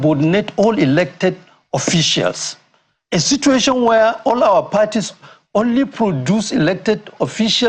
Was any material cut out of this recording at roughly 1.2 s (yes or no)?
no